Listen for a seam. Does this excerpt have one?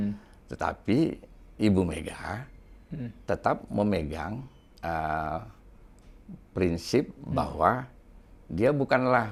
no; 0 cuts

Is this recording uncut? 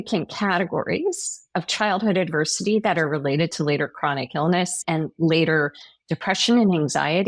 no; 1 cut; at 4.8 s

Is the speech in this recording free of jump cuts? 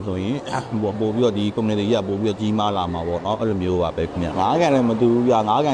yes; 0 cuts

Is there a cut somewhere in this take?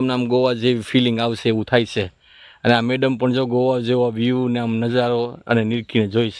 no; 0 cuts

